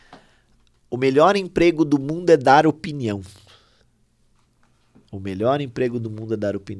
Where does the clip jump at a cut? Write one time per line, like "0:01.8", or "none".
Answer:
0:04.6